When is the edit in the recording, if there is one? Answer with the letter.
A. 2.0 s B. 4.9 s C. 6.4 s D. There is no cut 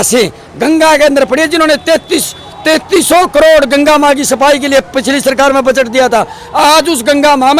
D